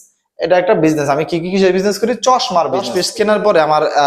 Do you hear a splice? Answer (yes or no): yes